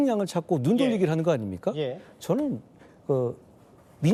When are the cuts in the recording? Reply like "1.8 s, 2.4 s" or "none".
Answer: none